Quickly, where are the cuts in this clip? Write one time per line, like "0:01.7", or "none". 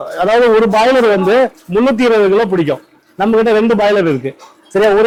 none